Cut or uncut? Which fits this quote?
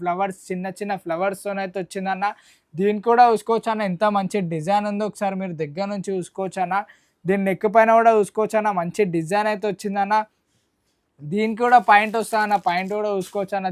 uncut